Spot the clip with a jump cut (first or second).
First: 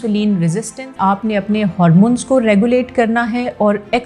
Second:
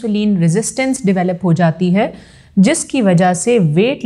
first